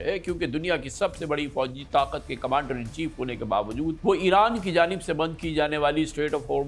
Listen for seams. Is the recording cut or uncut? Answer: cut